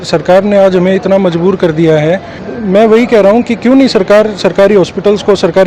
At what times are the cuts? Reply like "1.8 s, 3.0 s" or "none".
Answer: none